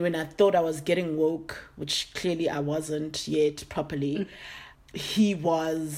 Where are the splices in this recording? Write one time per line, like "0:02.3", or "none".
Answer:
0:04.6